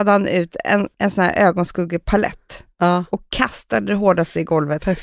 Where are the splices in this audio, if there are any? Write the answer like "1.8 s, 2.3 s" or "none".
0.9 s